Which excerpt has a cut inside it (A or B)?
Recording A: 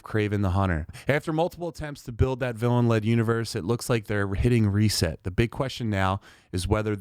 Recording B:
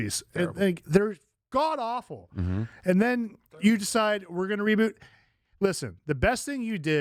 A